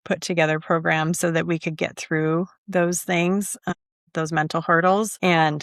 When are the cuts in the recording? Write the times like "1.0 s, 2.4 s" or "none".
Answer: none